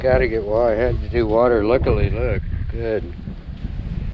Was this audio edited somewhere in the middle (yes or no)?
no